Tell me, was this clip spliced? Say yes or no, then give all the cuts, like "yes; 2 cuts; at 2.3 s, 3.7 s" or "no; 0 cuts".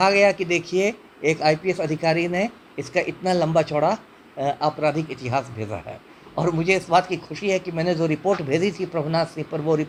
no; 0 cuts